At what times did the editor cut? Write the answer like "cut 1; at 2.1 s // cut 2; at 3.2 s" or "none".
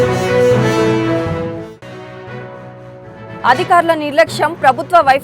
cut 1; at 2.1 s